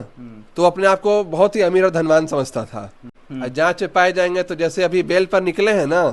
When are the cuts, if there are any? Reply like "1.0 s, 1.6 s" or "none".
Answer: 3.1 s